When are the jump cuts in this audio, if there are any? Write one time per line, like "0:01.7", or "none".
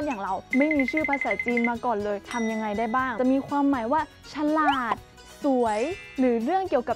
0:03.1